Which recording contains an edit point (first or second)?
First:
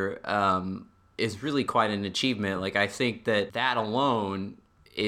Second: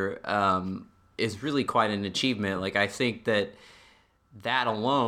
first